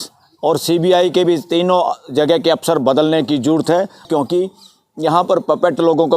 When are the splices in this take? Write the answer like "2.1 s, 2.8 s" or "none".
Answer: 4.1 s